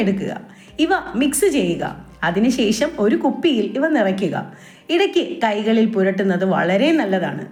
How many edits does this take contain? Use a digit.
0